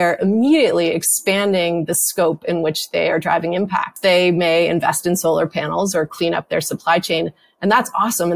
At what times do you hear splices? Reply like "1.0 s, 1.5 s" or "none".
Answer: 3.9 s